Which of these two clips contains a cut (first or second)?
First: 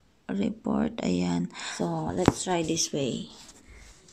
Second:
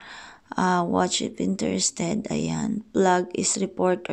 first